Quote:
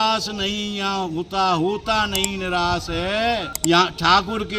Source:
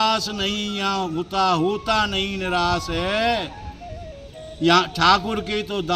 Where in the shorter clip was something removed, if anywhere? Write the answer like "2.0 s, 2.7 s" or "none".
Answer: 3.5 s